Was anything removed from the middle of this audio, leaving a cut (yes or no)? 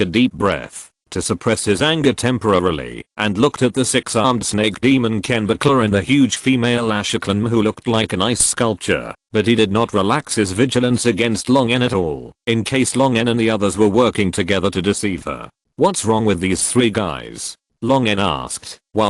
yes